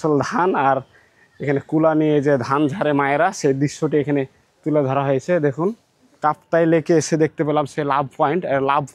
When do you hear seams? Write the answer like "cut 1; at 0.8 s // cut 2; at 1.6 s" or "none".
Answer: cut 1; at 6.2 s